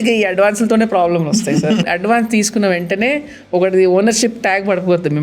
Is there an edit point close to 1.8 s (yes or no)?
yes